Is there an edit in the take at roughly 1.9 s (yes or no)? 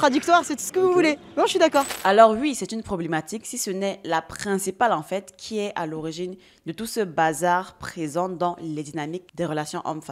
yes